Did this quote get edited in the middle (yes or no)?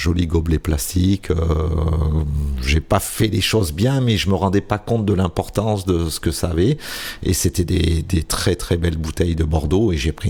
no